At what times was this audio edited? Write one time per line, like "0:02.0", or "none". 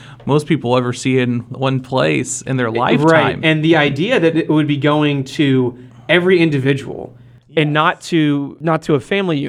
0:08.5